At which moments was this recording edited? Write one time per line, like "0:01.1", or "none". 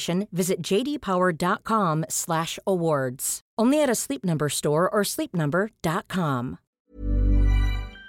0:06.8